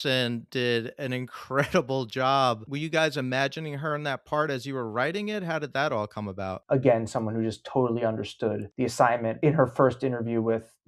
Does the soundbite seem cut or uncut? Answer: cut